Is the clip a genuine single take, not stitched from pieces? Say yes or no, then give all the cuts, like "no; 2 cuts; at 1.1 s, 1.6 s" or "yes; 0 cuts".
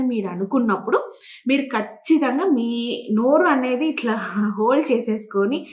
yes; 0 cuts